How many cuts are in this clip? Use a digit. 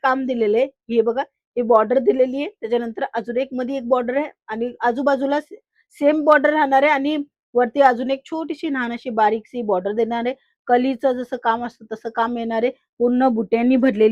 0